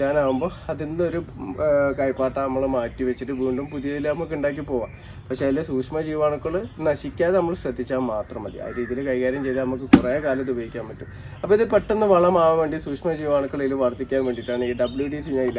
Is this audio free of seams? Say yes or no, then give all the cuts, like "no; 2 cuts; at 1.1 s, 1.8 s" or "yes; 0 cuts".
yes; 0 cuts